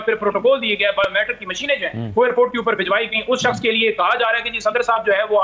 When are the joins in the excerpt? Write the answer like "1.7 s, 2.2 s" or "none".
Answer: none